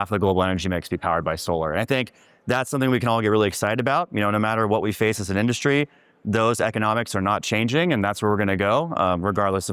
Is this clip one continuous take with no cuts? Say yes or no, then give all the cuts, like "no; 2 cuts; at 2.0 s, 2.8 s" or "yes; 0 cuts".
yes; 0 cuts